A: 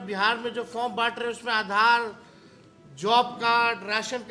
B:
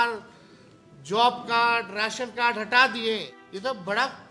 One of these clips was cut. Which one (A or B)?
B